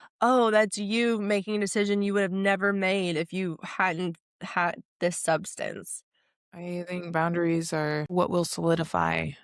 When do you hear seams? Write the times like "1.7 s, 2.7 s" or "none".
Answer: 6.4 s, 8.1 s